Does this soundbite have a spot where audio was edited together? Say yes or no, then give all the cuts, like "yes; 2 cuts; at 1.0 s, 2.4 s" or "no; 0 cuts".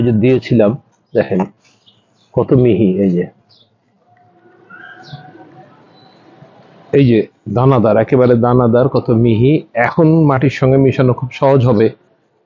no; 0 cuts